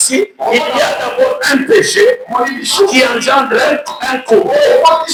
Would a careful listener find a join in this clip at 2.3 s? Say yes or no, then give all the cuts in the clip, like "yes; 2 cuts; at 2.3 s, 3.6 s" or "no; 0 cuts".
no; 0 cuts